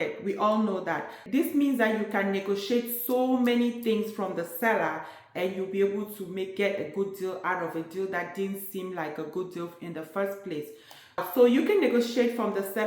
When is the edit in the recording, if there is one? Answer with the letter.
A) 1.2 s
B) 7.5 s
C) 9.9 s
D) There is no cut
A